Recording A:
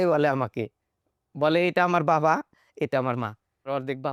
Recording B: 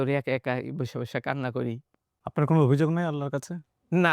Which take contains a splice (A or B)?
B